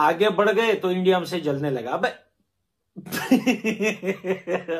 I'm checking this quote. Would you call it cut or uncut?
uncut